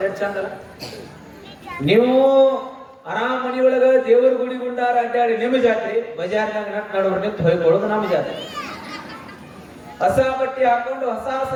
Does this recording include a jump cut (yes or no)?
no